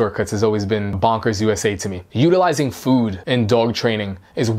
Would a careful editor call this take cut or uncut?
cut